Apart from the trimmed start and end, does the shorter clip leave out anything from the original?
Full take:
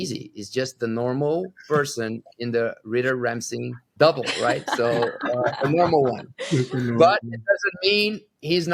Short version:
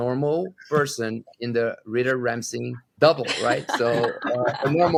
no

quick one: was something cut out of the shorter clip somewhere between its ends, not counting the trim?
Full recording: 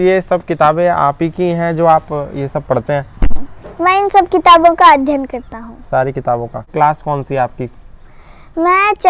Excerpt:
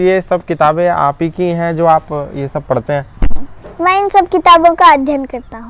no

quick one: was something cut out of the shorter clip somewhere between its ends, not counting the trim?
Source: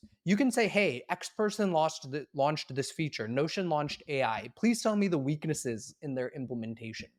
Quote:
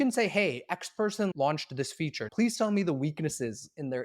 yes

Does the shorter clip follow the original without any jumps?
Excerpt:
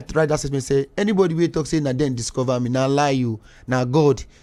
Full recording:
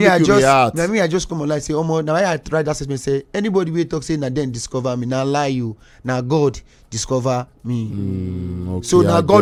yes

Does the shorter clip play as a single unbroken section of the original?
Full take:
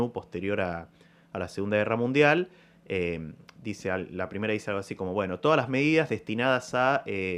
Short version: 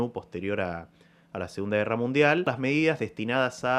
no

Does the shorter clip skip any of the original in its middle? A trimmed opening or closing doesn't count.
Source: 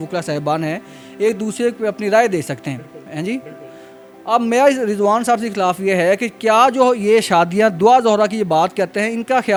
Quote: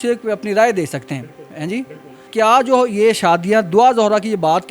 yes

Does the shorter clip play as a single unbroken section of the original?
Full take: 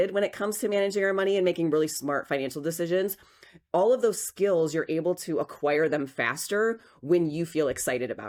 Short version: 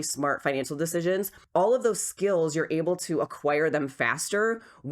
no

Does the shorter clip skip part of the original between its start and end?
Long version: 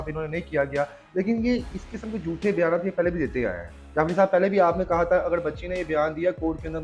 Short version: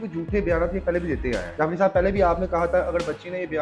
yes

